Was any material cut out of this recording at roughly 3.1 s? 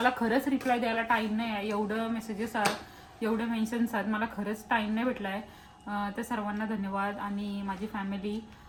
no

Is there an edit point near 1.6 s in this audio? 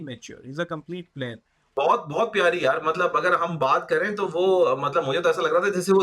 yes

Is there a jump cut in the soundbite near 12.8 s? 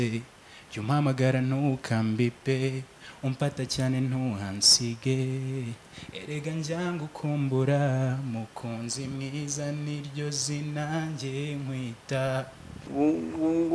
yes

